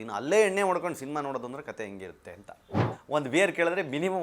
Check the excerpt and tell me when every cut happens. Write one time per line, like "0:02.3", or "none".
0:03.0